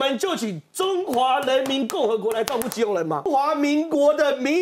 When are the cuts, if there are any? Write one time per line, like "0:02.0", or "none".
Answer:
0:03.3